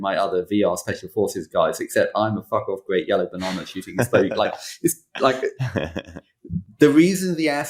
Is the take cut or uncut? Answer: uncut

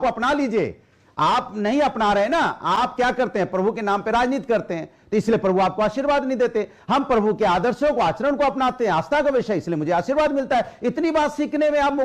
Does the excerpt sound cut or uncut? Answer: uncut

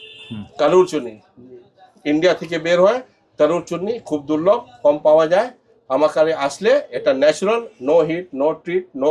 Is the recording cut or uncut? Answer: uncut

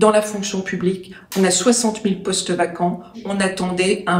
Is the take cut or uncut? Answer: cut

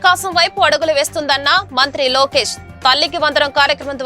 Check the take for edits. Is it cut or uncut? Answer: uncut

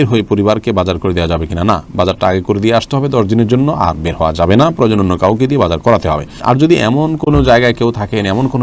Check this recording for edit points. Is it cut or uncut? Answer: uncut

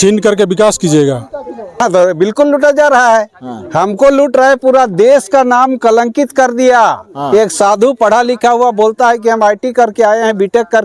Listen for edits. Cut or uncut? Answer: cut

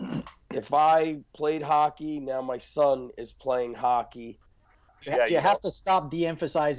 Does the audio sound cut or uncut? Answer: cut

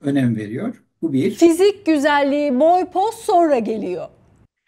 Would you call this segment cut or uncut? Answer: uncut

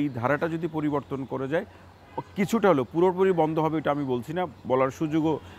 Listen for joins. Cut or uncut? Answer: uncut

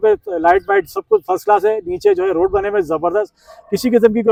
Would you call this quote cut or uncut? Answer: uncut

